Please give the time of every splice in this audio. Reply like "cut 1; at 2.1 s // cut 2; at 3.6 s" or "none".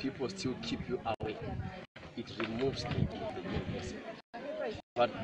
cut 1; at 1.3 s